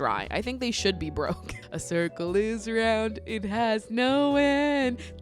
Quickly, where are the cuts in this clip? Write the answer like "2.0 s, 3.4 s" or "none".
1.6 s